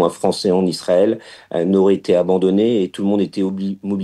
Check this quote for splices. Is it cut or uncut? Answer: uncut